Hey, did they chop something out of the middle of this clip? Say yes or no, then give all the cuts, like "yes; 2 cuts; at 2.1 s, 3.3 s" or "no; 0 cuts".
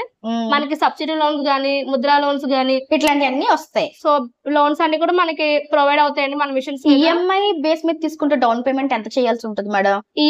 no; 0 cuts